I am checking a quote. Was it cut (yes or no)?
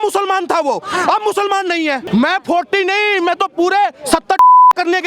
yes